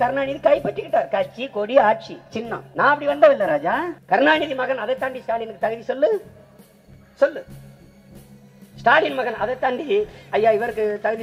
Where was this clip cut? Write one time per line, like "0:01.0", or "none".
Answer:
0:02.6
0:04.0